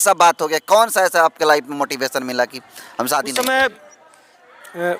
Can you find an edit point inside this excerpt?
yes; 1 cut; at 3.3 s

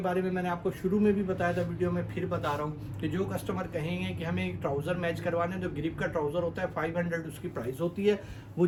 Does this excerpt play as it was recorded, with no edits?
yes; 0 cuts

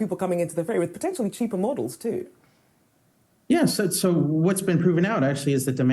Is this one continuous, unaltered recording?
yes; 0 cuts

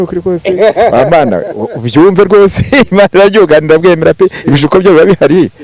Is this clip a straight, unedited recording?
yes; 0 cuts

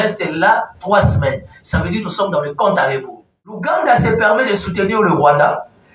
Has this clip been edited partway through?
yes; 1 cut; at 3.6 s

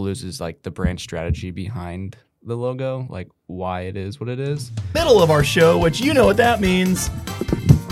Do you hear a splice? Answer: yes; 1 cut; at 4.9 s

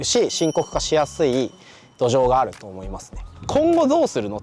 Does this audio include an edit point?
yes; 1 cut; at 3.4 s

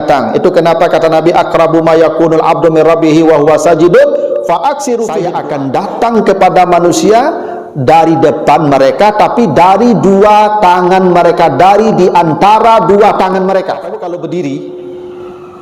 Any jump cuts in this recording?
yes; 2 cuts; at 5.3 s, 13.9 s

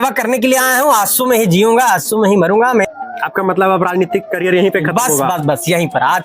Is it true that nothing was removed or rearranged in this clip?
no; 1 cut; at 2.9 s

